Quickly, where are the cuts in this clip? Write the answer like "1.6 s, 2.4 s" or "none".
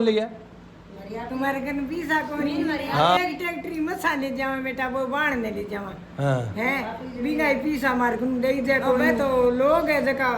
3.2 s, 9.2 s